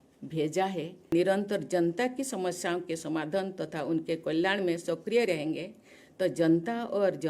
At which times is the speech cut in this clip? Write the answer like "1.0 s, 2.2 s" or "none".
1.1 s